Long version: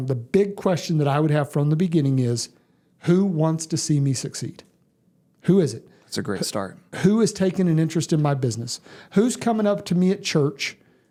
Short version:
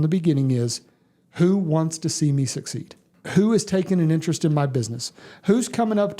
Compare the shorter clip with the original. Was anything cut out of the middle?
yes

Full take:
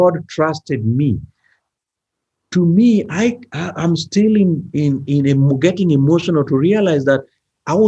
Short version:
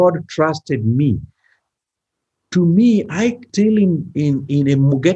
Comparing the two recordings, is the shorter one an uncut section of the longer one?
no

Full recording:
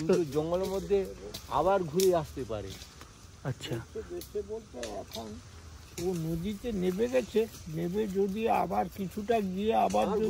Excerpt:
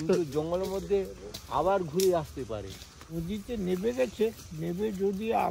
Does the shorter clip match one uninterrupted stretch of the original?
no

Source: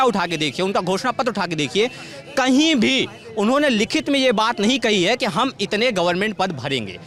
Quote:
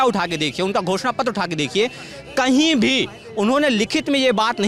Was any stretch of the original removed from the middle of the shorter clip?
no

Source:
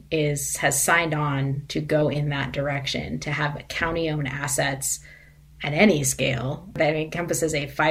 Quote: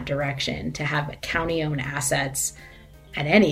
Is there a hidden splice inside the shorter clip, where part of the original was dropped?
no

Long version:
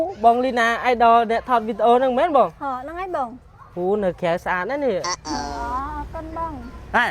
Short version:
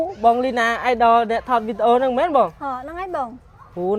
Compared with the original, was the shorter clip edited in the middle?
no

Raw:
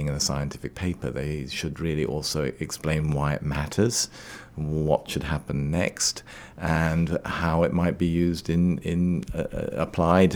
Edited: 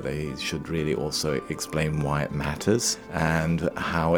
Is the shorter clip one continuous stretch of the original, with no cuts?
no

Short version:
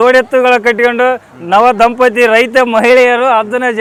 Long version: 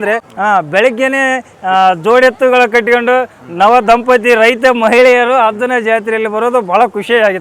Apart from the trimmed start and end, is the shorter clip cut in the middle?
no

